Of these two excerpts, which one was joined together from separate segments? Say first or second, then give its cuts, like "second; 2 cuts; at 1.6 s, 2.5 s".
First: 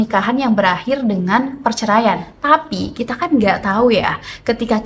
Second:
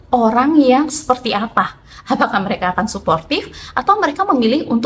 first; 1 cut; at 2.3 s